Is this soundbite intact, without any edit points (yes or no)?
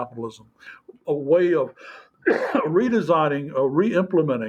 yes